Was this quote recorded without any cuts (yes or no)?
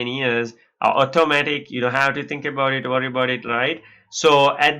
yes